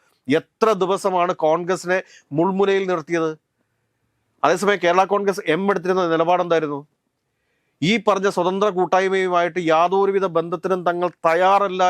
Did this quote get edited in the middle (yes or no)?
no